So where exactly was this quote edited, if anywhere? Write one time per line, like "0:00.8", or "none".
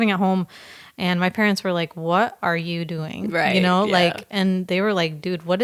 none

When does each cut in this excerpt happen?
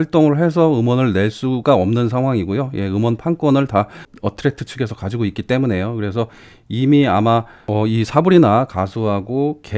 0:07.6

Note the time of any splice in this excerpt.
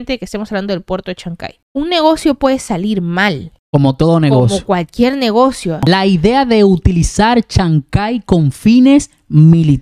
0:05.8

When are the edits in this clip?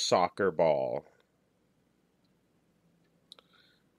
0:02.5

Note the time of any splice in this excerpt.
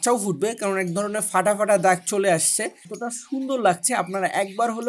0:03.0

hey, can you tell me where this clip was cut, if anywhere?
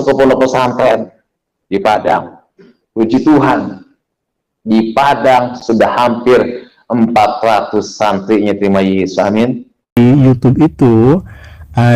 0:10.0

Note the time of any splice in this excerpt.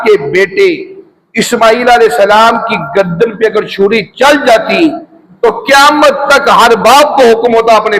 none

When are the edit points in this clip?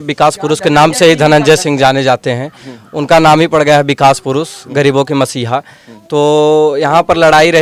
none

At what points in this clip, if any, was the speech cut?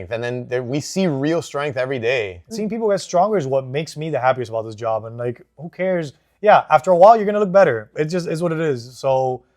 0:02.4

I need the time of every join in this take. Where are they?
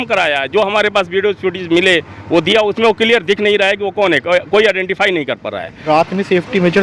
0:05.8

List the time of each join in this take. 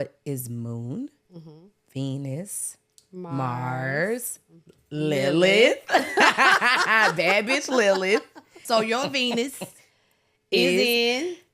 0:08.6

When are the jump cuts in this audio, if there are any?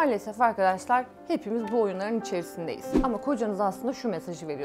0:02.8

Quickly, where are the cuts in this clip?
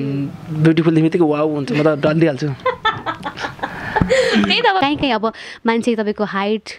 0:04.8

